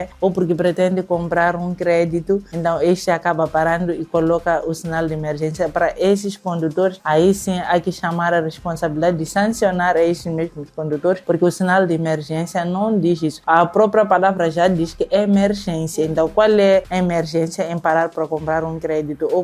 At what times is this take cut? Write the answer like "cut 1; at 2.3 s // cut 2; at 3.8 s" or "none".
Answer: none